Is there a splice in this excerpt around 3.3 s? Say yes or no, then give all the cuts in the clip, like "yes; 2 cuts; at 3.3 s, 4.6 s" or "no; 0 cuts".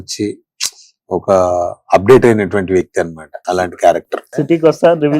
yes; 2 cuts; at 3.3 s, 4.2 s